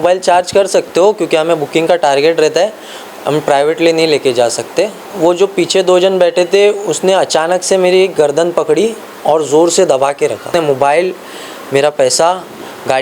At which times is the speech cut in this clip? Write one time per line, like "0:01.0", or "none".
0:05.1
0:10.5